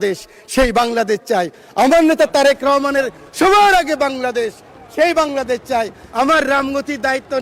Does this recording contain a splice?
no; 0 cuts

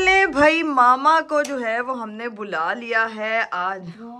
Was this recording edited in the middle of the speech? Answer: no; 0 cuts

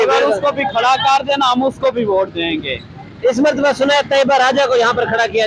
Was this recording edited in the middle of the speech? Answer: no; 0 cuts

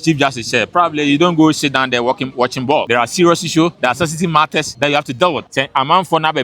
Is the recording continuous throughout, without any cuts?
no; 4 cuts; at 2.9 s, 3.8 s, 4.7 s, 5.5 s

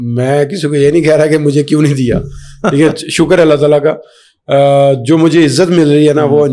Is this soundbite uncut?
yes; 0 cuts

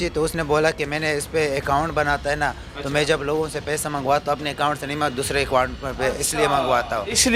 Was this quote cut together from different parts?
no; 0 cuts

